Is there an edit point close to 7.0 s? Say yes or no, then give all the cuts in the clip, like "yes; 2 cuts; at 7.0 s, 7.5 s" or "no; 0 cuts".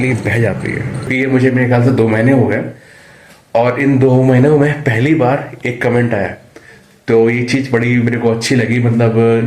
no; 1 cut; at 1.1 s